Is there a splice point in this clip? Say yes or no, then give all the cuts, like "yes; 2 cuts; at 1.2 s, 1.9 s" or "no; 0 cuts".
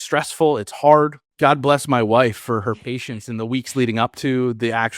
yes; 1 cut; at 1.2 s